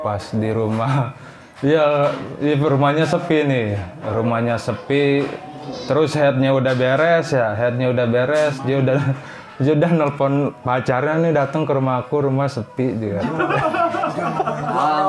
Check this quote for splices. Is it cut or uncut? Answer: uncut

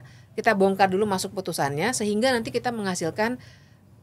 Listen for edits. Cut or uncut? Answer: uncut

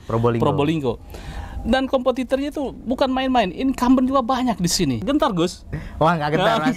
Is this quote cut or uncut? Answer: cut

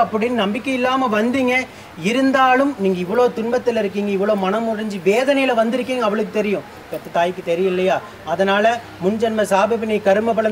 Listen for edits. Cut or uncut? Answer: uncut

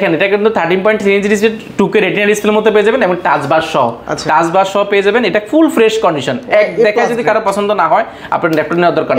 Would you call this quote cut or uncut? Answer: uncut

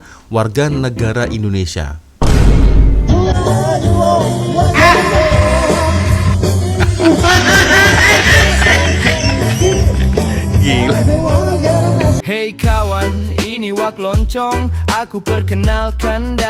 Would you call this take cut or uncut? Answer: cut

